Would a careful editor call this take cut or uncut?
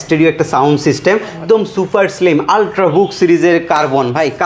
cut